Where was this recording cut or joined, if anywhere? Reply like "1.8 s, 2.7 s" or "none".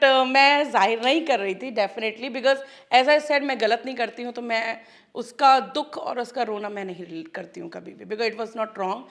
none